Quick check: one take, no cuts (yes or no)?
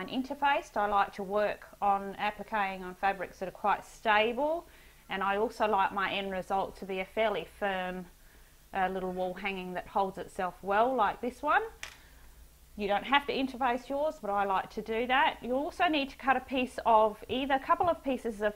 no